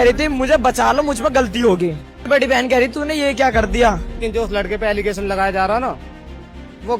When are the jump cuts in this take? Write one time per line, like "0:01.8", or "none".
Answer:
0:02.2
0:04.1